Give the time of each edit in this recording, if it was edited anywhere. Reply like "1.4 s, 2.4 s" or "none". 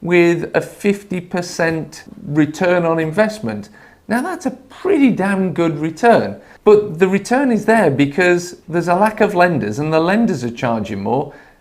2.1 s, 6.4 s